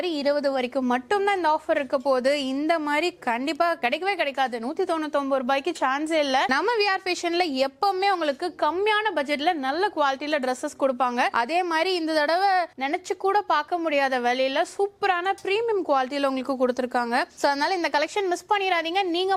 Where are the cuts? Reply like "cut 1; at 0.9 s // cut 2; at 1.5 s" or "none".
none